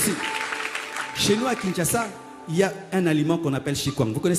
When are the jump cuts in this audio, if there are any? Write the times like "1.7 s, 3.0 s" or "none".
none